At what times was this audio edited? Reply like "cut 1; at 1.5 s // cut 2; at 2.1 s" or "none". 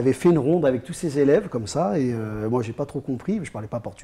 none